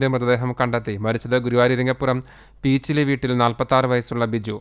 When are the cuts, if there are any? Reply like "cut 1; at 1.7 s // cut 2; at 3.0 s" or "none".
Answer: none